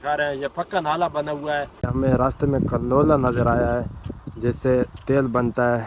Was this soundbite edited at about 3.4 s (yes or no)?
no